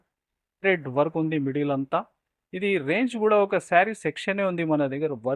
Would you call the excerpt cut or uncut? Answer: uncut